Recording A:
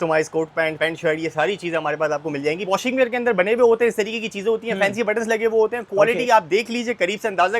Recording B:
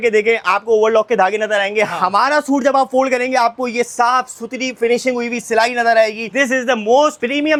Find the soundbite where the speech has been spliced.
A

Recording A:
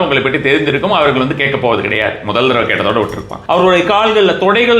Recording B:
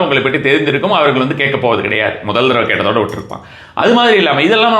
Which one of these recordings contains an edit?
A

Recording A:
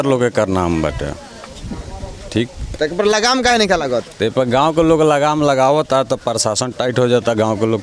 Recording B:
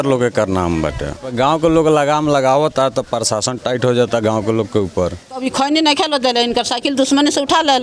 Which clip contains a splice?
B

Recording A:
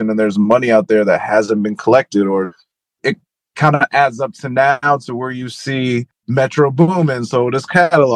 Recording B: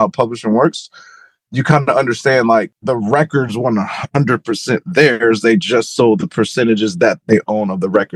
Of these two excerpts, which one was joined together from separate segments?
A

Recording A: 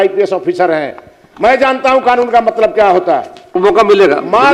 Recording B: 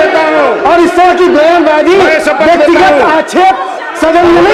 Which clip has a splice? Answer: A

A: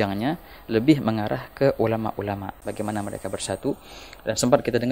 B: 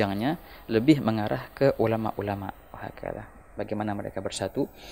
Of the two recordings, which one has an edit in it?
A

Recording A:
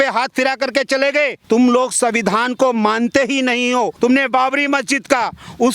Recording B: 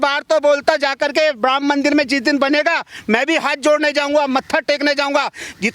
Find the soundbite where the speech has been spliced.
A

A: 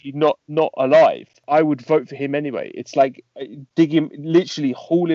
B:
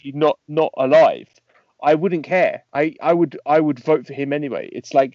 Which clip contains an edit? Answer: A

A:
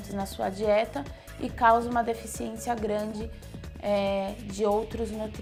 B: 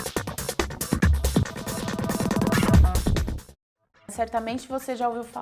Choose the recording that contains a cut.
B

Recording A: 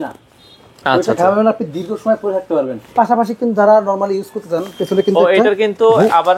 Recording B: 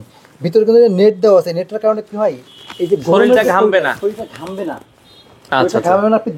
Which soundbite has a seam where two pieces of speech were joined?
A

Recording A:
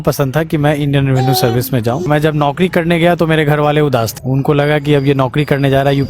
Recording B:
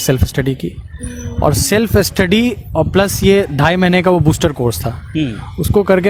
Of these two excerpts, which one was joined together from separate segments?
A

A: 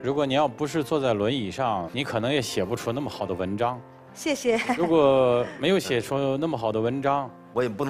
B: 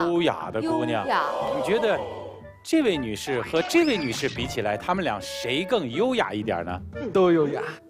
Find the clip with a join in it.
B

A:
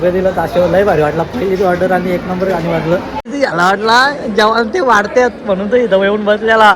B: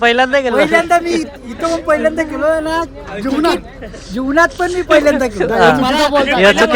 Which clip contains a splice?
A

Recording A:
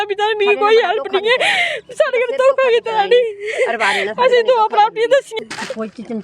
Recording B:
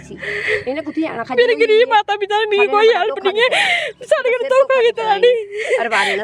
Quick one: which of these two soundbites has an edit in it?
A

